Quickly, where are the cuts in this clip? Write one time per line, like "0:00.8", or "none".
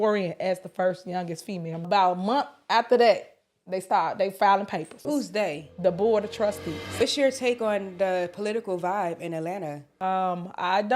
0:01.8
0:05.0
0:07.0
0:09.9